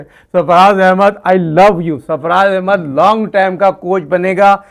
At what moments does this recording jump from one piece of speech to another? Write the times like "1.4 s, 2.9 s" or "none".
none